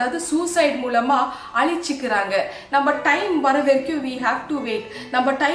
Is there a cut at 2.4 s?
no; 0 cuts

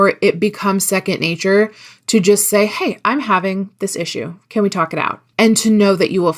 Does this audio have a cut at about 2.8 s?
no; 1 cut; at 5.2 s

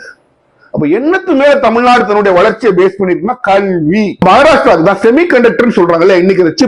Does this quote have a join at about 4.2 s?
yes; 1 cut; at 4.2 s

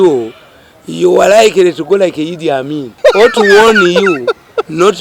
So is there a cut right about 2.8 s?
yes; 1 cut; at 2.8 s

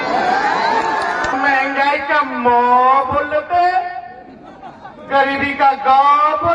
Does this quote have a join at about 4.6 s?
no; 1 cut; at 1.3 s

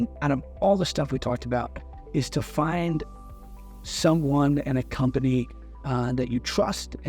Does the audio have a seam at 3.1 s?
no; 0 cuts

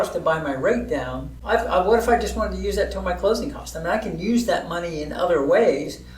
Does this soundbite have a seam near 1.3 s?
yes; 1 cut; at 1.3 s

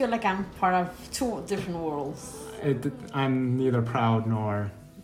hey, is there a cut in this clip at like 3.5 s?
no; 1 cut; at 2.0 s

